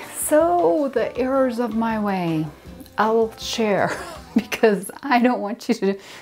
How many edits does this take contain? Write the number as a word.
zero